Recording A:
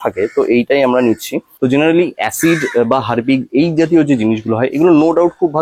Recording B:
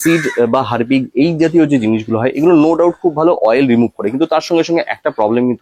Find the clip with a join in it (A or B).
A